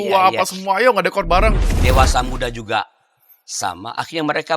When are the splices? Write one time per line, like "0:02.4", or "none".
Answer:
0:01.7